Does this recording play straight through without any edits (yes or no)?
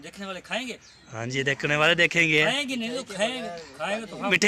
yes